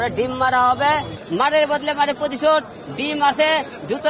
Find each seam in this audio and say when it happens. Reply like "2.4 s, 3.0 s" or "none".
1.2 s